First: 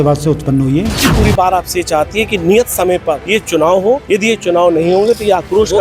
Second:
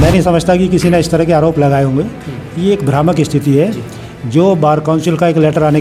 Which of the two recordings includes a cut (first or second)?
first